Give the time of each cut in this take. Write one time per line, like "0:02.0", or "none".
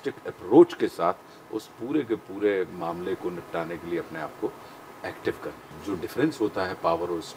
0:05.8